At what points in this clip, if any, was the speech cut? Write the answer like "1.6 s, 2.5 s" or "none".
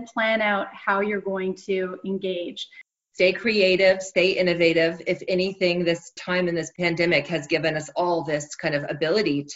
2.9 s